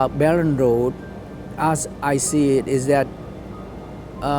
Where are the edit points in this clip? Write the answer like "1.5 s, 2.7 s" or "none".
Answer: none